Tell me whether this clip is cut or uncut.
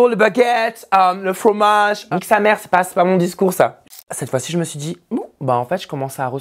cut